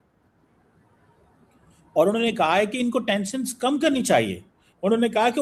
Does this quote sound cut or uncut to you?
uncut